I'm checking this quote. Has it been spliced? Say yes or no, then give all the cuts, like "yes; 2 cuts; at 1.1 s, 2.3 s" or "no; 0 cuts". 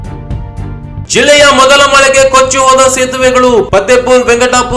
yes; 1 cut; at 1.1 s